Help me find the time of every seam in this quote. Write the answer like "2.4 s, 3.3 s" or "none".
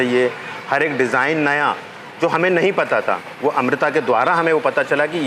none